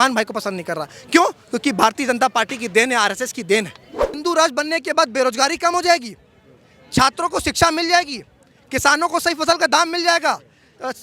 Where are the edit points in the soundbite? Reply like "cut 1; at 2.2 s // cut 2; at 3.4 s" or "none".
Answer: cut 1; at 4.2 s